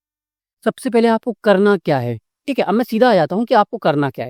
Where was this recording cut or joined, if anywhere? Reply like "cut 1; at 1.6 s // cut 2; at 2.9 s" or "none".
none